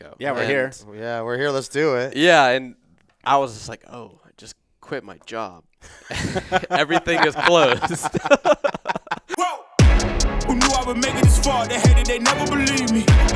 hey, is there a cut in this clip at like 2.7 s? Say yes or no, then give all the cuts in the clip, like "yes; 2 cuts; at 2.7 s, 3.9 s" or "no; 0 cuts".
no; 1 cut; at 9.2 s